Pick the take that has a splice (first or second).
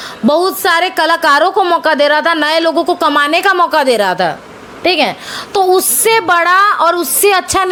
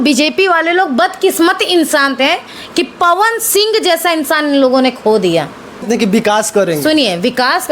second